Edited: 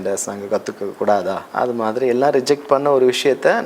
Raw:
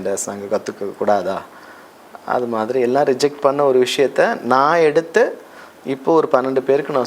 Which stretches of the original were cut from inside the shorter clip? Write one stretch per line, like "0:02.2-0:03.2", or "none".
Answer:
0:01.5-0:02.2